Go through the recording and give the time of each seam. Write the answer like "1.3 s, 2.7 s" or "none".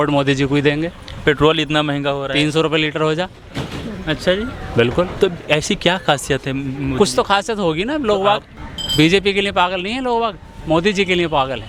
none